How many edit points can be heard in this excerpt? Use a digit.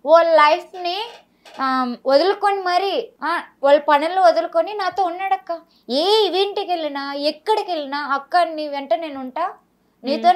0